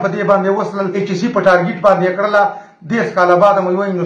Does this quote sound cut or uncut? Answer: cut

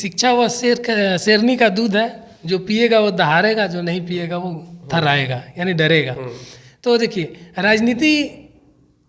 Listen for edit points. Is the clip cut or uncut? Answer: uncut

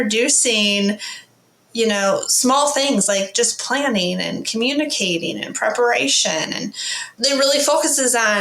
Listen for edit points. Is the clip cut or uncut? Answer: cut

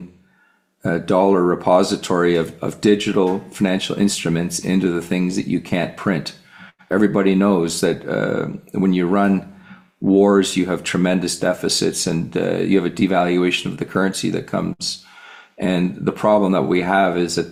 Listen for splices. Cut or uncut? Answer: uncut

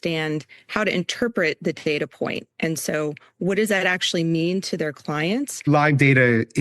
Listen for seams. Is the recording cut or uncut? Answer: cut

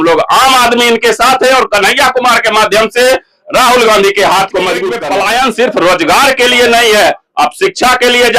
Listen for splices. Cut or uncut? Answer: cut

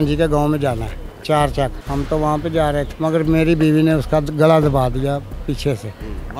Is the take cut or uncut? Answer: cut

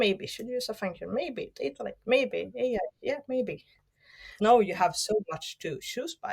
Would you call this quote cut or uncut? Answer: cut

